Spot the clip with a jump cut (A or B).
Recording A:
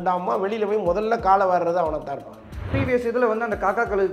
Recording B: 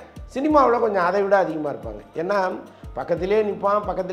A